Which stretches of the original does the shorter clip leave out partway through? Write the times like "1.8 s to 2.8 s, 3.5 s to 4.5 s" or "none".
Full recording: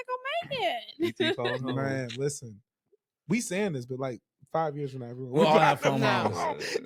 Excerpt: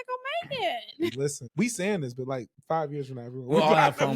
1.1 s to 2.9 s, 4.2 s to 4.4 s